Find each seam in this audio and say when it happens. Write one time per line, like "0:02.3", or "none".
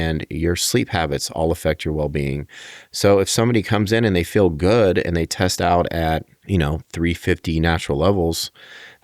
0:06.3